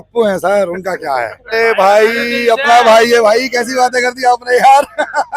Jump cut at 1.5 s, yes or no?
yes